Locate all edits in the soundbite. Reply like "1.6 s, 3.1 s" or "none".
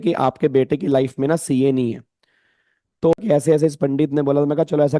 3.1 s